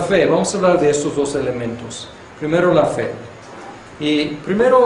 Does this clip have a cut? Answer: yes; 1 cut; at 1.1 s

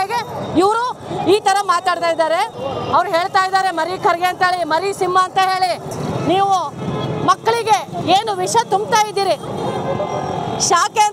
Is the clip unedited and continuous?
no; 2 cuts; at 2.6 s, 5.9 s

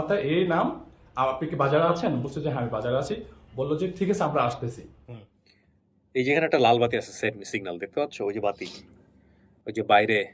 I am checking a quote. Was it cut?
yes; 1 cut; at 5.0 s

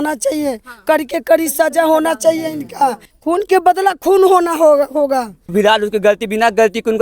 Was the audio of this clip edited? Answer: yes; 2 cuts; at 3.1 s, 5.4 s

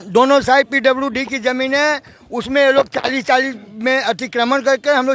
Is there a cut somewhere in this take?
no; 0 cuts

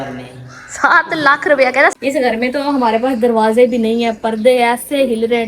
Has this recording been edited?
yes; 1 cut; at 2.0 s

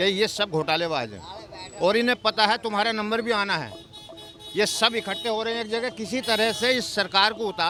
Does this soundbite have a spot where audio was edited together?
no; 0 cuts

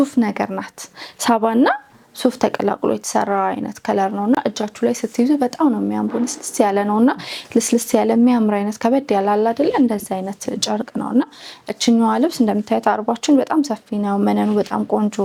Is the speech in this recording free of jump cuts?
yes; 0 cuts

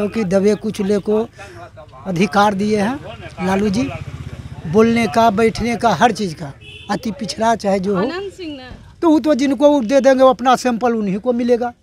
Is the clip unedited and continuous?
yes; 0 cuts

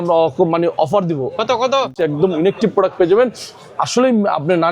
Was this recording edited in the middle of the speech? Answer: yes; 1 cut; at 2.0 s

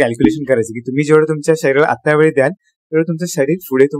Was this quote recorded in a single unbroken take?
yes; 0 cuts

